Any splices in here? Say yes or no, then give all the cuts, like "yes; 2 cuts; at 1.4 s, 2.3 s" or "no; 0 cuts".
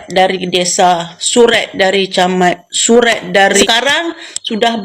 yes; 1 cut; at 3.6 s